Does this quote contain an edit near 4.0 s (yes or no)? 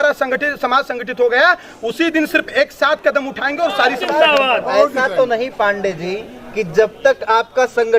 yes